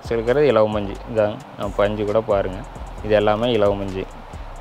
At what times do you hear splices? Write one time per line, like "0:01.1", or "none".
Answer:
none